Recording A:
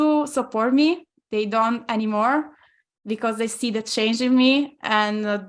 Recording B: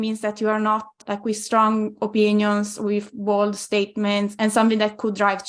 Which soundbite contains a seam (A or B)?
B